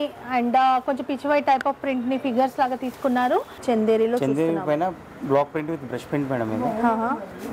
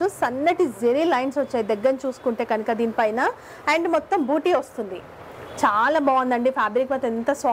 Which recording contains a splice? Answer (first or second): first